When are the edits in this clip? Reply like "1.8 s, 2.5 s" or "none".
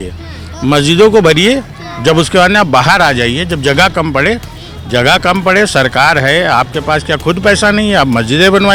none